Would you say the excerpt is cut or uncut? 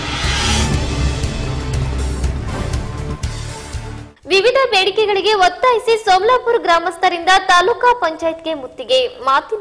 cut